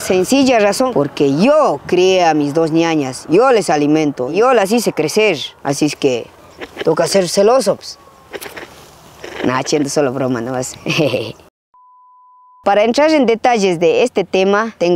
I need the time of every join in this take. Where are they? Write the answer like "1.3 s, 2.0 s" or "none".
none